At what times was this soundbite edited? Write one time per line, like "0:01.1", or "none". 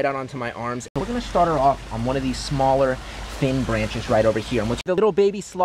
0:00.9
0:04.9